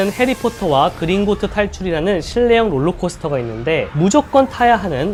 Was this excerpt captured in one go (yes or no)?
yes